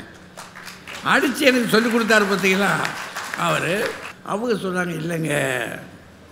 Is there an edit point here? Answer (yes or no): yes